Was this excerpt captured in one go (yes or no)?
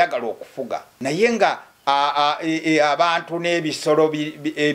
no